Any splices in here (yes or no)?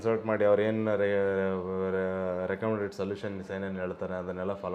no